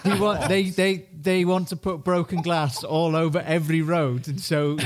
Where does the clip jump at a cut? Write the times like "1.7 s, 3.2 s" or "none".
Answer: none